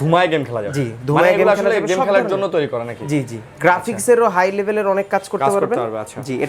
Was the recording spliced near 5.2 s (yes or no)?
no